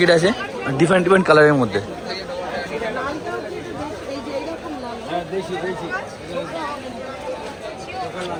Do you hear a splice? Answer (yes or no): no